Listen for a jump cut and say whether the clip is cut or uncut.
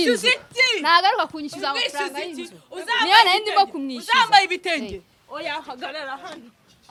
uncut